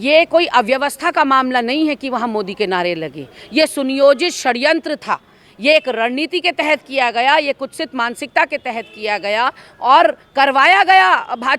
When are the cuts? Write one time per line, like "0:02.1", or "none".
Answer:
none